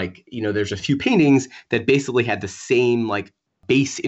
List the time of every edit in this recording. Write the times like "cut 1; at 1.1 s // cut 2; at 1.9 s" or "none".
none